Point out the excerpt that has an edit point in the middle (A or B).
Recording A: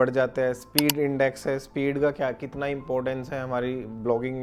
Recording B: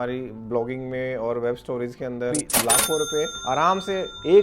B